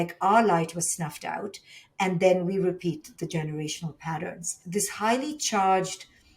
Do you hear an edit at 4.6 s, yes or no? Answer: yes